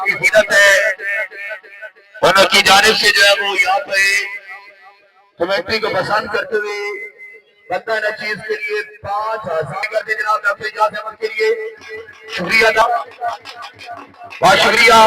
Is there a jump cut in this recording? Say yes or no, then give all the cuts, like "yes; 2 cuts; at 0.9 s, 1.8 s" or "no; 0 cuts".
yes; 2 cuts; at 9.8 s, 12.8 s